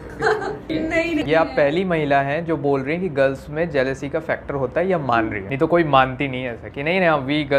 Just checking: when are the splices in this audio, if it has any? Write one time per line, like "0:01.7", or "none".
0:01.2